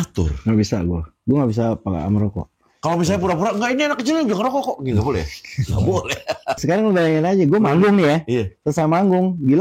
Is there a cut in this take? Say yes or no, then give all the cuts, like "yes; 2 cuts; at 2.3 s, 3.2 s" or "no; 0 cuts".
yes; 1 cut; at 6.6 s